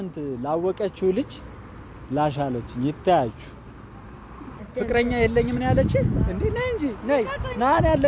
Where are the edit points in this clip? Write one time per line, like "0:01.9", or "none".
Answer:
0:04.7